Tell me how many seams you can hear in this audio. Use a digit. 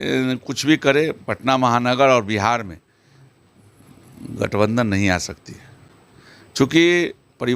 0